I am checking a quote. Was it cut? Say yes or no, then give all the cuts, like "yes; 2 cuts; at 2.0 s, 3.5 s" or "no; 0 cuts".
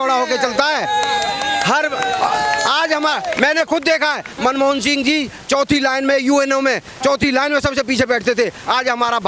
no; 0 cuts